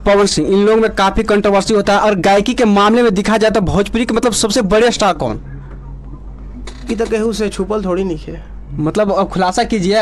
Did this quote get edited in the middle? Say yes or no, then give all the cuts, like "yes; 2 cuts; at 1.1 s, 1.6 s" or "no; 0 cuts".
no; 0 cuts